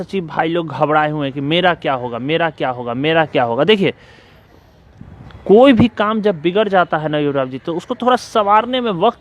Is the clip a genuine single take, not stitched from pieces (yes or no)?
yes